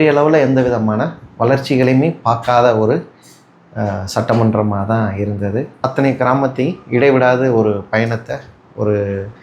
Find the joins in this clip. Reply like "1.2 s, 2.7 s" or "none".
5.9 s